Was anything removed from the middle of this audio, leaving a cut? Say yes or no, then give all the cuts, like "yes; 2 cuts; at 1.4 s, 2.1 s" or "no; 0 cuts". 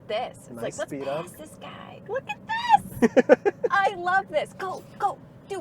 no; 0 cuts